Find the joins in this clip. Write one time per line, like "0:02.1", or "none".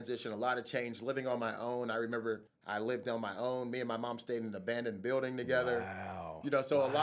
0:02.5